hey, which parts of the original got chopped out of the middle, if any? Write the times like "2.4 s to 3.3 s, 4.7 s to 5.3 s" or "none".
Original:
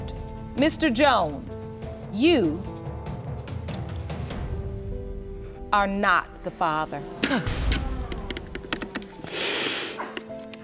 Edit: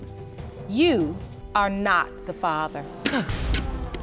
2.8 s to 5.5 s